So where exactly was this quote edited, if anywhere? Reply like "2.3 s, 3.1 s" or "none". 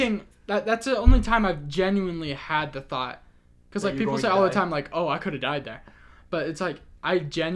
none